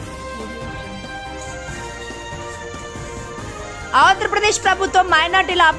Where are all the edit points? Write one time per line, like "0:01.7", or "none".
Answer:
none